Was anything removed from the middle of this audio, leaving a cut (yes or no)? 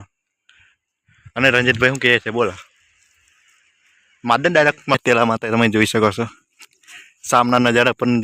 yes